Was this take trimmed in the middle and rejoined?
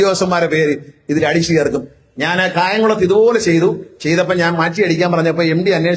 no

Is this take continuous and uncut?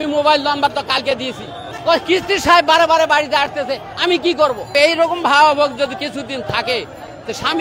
no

